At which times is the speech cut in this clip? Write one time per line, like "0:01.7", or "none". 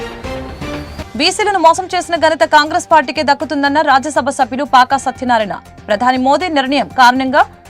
0:01.0